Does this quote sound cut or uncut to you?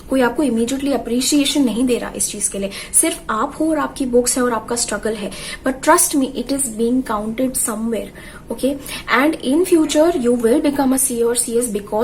uncut